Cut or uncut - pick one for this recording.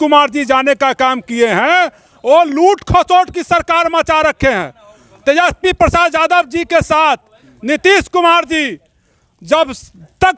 uncut